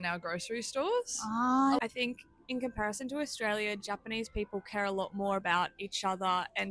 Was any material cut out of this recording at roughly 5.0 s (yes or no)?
no